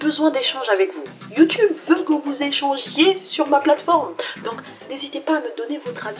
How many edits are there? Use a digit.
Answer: 1